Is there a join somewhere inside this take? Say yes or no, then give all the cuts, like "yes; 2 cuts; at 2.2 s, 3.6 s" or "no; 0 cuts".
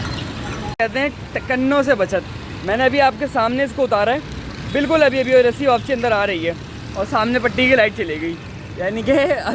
no; 0 cuts